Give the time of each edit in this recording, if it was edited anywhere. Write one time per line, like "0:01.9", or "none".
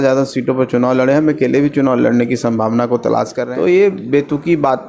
0:03.4